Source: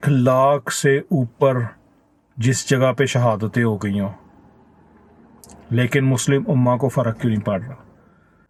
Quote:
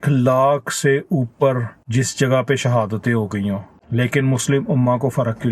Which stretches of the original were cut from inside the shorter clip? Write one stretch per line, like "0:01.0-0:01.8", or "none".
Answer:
0:01.8-0:02.3
0:04.3-0:05.5